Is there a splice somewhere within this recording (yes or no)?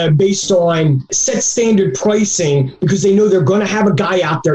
no